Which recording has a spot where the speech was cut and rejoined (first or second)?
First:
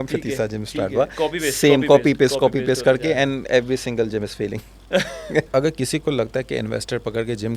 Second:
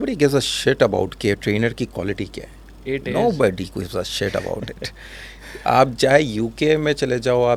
first